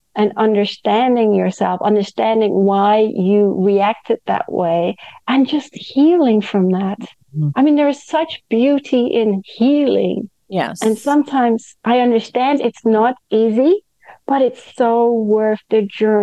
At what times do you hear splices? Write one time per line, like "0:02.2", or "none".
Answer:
none